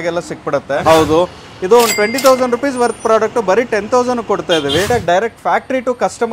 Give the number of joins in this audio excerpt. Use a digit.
2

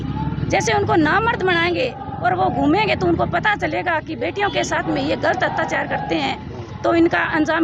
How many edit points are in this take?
0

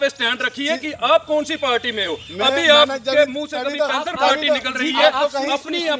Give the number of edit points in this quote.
0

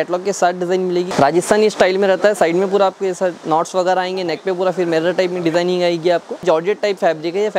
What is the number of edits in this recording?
2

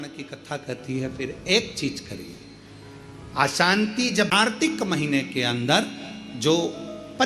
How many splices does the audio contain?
1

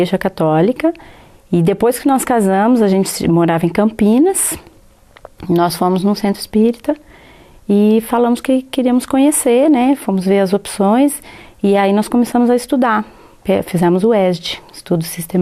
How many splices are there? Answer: 1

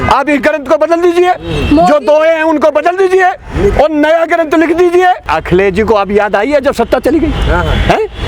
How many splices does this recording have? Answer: 1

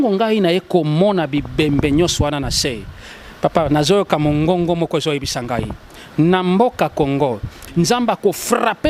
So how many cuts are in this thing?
1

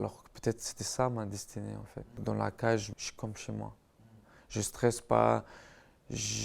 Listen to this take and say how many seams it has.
2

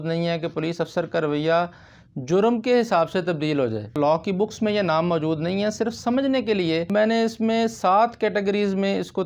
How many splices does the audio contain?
2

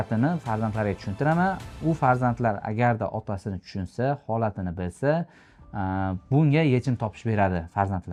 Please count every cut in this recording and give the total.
0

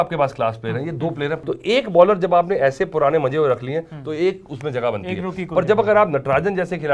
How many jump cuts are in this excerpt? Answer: 1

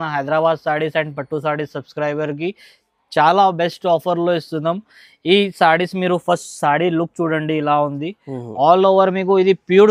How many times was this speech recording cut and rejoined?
0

